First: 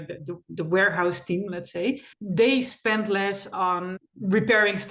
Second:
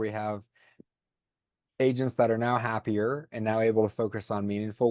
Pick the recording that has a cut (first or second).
first